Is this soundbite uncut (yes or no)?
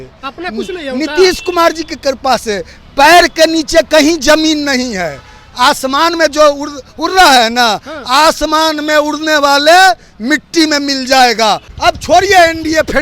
no